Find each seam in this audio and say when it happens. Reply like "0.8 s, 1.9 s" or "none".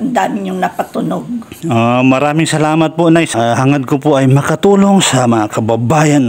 3.3 s